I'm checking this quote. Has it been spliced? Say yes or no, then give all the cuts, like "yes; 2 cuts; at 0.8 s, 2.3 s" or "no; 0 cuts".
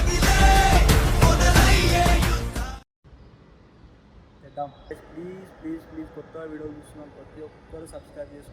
yes; 1 cut; at 4.9 s